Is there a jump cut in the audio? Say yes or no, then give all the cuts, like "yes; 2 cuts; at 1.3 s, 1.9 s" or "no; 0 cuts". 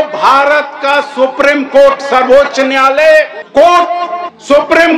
no; 0 cuts